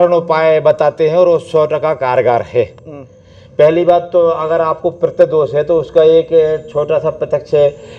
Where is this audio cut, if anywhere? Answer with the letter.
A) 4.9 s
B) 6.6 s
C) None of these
C